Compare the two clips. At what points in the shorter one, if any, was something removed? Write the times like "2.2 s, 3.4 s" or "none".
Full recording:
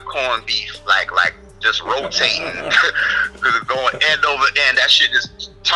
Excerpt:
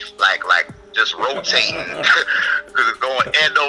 none